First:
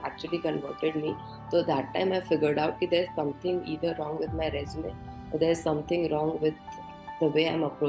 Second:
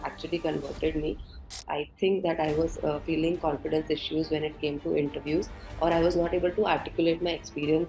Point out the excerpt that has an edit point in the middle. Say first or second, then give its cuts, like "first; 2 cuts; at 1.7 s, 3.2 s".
second; 1 cut; at 1.5 s